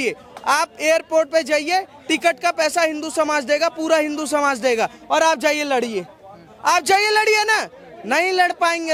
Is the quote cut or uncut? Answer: uncut